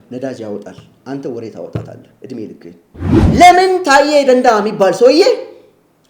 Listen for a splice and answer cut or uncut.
cut